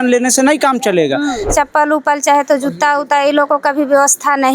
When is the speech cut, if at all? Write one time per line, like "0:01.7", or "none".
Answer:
0:01.5